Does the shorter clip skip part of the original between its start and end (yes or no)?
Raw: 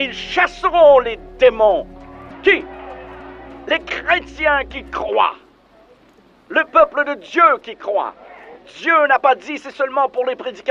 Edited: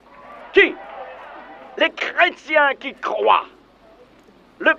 no